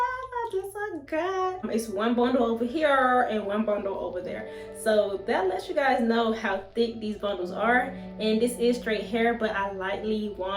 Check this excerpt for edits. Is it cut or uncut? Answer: cut